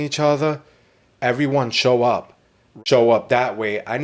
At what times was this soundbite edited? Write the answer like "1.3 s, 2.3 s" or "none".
2.6 s